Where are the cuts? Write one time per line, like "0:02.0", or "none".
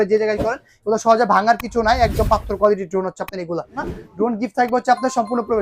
0:03.9